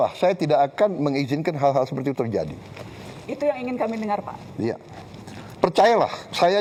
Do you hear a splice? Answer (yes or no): no